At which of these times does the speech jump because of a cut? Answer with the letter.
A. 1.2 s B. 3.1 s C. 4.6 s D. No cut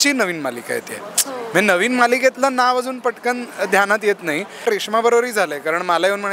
C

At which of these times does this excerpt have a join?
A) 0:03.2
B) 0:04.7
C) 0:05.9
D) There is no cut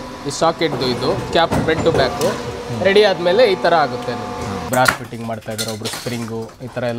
B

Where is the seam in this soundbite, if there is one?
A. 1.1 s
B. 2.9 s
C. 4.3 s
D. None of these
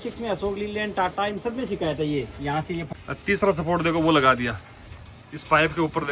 B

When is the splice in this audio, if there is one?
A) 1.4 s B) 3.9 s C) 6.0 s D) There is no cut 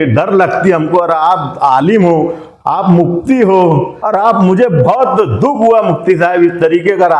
B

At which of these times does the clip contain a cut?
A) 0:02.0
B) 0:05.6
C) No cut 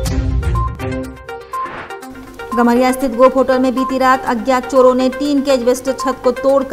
C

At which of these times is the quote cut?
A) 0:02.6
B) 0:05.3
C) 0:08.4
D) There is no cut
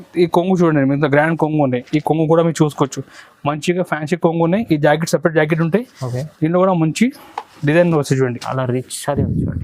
C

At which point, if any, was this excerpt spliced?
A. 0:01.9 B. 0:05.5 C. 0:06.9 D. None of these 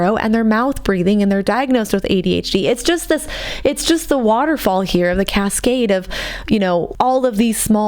C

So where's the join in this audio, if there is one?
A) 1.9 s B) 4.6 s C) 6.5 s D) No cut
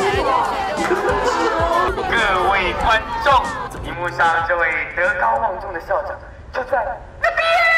A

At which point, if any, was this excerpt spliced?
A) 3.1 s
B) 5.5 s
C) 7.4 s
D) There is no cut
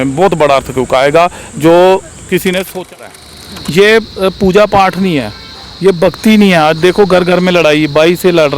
A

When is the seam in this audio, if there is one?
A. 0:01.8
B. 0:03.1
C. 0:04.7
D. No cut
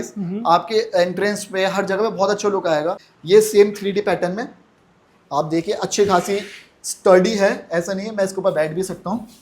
B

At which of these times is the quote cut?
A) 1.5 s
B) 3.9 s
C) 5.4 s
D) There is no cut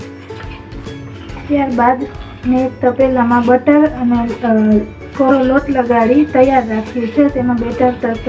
A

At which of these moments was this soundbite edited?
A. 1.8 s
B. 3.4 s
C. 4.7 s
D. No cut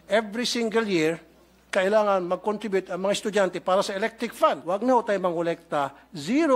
C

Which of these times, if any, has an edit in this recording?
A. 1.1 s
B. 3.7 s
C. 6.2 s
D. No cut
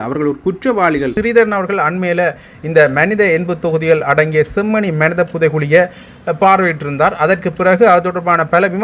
A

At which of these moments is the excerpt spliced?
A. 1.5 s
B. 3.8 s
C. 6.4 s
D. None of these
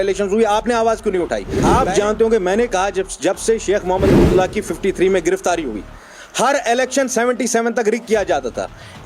A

